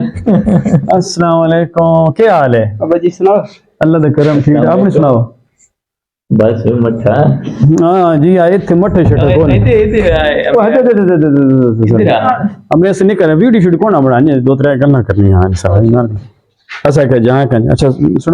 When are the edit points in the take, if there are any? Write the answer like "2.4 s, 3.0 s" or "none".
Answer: none